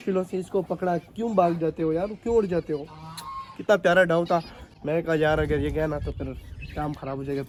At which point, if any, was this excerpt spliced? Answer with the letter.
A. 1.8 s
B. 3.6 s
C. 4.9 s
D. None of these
D